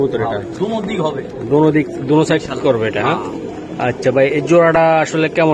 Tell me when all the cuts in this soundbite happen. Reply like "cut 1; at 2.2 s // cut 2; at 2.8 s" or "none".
none

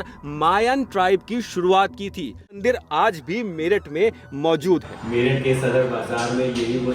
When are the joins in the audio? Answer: cut 1; at 2.6 s

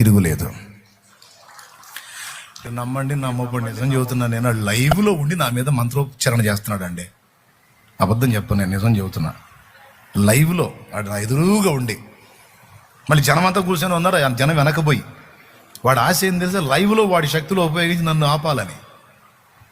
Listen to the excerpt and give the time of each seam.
cut 1; at 2.7 s

